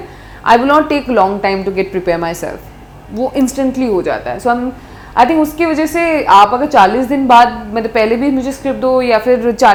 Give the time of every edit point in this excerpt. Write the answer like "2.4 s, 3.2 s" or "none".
none